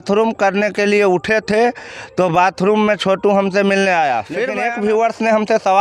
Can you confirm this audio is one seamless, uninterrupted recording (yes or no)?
no